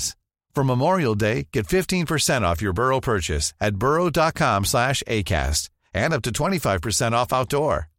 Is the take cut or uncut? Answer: uncut